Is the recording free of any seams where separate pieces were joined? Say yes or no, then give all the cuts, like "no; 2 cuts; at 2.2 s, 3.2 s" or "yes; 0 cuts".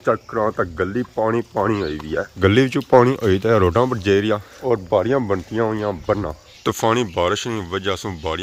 yes; 0 cuts